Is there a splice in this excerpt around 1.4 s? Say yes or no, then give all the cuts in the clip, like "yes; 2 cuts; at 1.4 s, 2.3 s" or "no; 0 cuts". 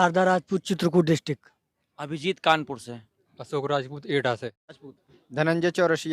no; 1 cut; at 4.9 s